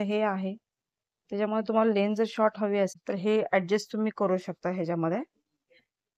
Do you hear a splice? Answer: yes; 1 cut; at 3.0 s

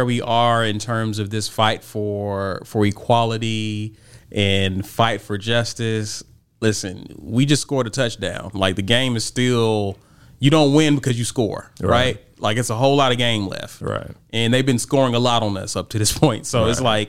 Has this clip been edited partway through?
no; 0 cuts

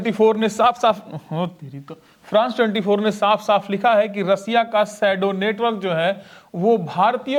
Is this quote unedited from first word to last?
yes; 0 cuts

